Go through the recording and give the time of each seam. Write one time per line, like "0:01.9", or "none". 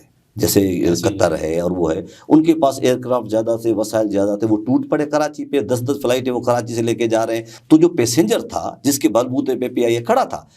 0:07.5